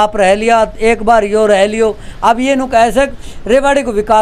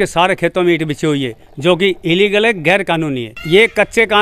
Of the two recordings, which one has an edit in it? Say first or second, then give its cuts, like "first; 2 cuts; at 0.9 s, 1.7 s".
second; 1 cut; at 3.3 s